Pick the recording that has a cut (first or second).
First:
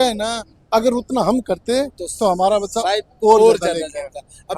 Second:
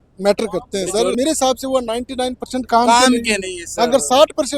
second